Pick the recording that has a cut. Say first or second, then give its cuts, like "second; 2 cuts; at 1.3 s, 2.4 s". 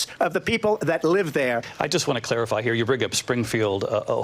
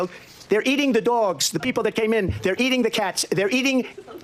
first; 1 cut; at 1.7 s